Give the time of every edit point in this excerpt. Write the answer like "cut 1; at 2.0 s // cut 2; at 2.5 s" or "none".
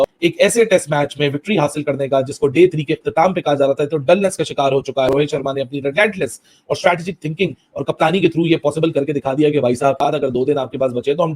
cut 1; at 5.1 s // cut 2; at 10.0 s

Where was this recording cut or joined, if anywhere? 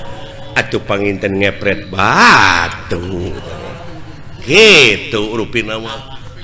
none

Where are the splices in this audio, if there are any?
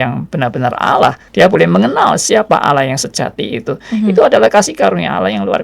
cut 1; at 1.2 s

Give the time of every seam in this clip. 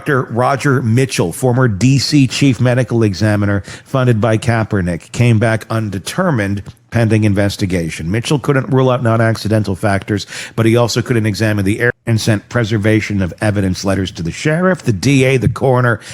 cut 1; at 11.9 s

